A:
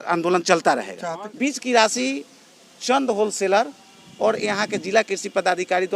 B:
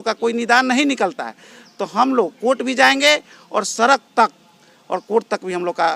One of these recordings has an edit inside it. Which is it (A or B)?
A